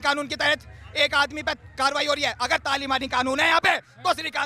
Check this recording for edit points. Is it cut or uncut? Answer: uncut